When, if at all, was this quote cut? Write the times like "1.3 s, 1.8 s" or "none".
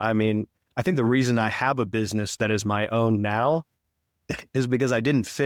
none